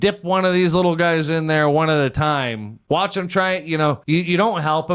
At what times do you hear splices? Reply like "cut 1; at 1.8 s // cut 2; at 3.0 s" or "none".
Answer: cut 1; at 2.7 s // cut 2; at 4.0 s

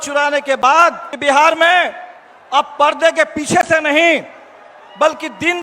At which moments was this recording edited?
cut 1; at 1.1 s

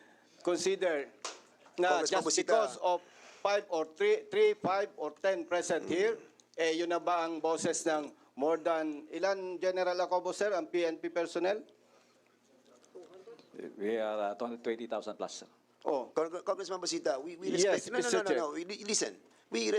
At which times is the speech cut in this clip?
none

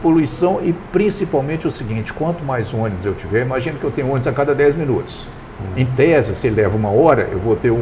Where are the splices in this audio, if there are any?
none

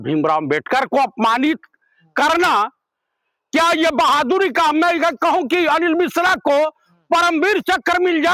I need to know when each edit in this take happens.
none

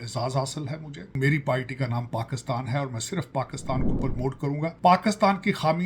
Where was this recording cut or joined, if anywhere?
cut 1; at 1.1 s // cut 2; at 4.1 s

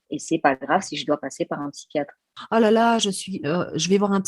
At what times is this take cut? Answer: cut 1; at 2.4 s

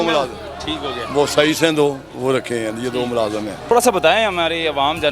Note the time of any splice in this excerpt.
cut 1; at 3.7 s

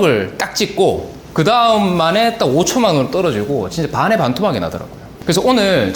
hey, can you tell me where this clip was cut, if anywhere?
cut 1; at 1.2 s // cut 2; at 5.0 s

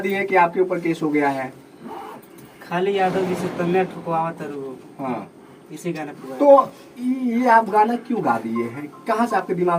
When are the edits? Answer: none

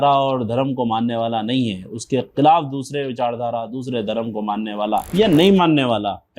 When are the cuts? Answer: cut 1; at 5.1 s

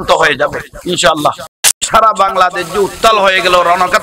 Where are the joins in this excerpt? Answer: cut 1; at 1.7 s

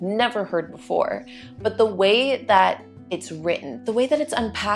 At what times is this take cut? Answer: cut 1; at 3.7 s

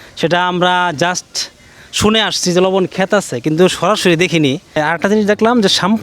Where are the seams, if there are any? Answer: cut 1; at 4.8 s

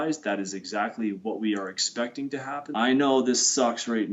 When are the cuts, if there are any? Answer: cut 1; at 2.6 s

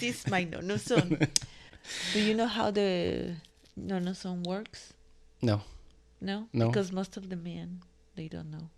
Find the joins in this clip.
none

